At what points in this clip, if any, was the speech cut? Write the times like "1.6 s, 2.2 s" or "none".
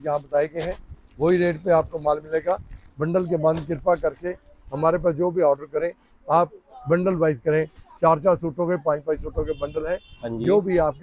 none